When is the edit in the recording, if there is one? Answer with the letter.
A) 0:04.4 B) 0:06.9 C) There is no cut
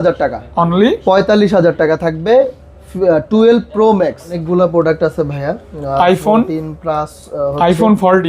A